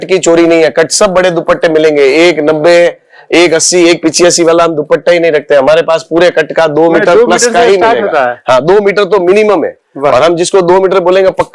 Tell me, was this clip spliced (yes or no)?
no